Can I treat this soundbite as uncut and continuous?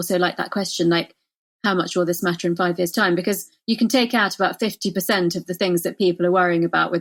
yes; 0 cuts

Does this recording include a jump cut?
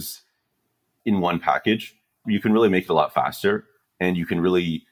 yes; 2 cuts; at 0.9 s, 2.2 s

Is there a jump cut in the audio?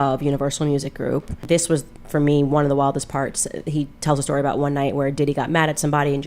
yes; 1 cut; at 1.4 s

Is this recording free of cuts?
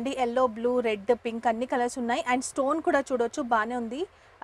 yes; 0 cuts

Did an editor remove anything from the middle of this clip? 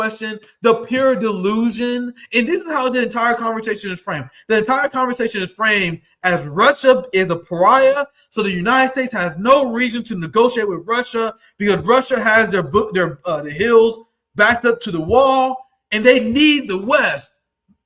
no; 0 cuts

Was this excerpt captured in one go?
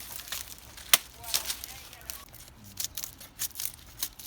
no; 1 cut; at 2.2 s

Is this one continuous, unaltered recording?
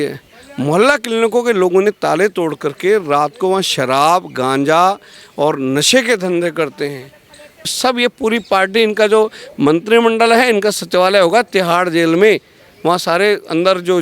no; 1 cut; at 7.7 s

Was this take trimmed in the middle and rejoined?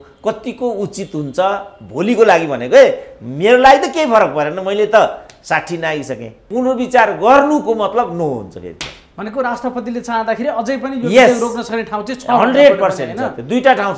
yes; 1 cut; at 6.3 s

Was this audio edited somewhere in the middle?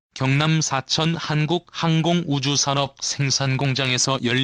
no; 0 cuts

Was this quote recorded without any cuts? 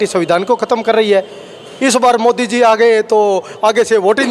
yes; 0 cuts

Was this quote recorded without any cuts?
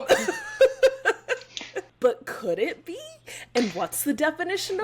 no; 1 cut; at 1.8 s

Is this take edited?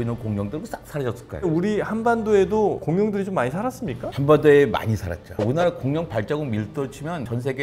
yes; 2 cuts; at 1.5 s, 5.3 s

